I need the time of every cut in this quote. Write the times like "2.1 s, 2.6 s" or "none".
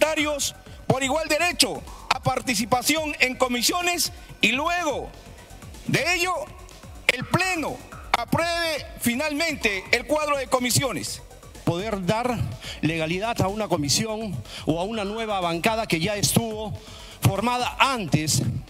11.6 s